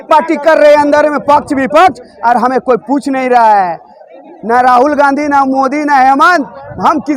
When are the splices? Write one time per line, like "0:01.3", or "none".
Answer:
none

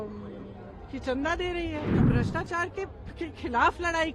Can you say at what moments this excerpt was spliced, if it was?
0:02.0

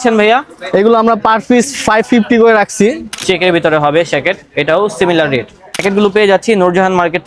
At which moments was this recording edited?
0:03.1
0:05.8

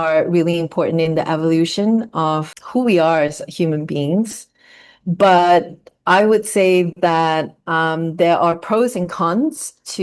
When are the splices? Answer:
0:02.6

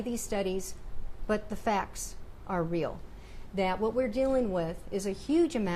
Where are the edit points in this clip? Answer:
none

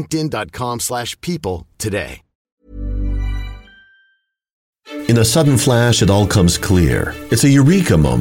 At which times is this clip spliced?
0:04.8

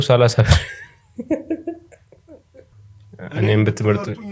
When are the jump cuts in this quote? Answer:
0:02.8

